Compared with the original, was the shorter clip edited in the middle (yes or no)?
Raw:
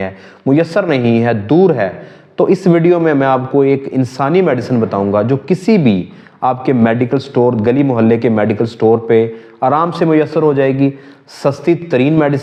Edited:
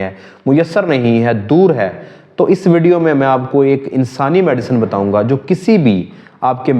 no